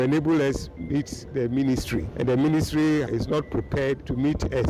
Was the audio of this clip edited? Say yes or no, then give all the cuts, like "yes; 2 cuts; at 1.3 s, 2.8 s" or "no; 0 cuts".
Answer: yes; 2 cuts; at 2.1 s, 3.5 s